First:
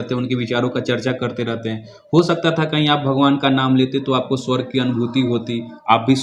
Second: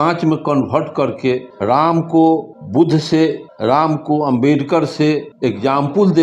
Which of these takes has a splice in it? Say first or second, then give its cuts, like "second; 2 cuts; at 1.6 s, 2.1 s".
second; 4 cuts; at 1.5 s, 2.6 s, 3.5 s, 5.3 s